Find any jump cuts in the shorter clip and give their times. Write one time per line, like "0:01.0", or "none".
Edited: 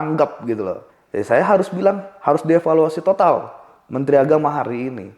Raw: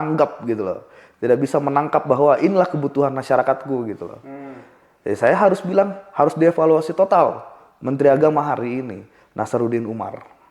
0:00.9